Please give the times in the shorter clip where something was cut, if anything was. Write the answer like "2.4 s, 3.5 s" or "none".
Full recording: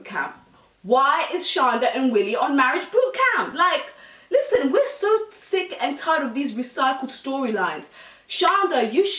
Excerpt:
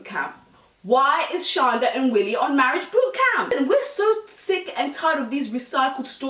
3.5 s